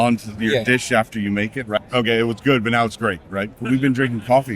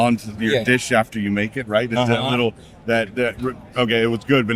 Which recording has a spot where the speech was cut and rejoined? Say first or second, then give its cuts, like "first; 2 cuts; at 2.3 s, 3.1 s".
first; 2 cuts; at 1.8 s, 3.6 s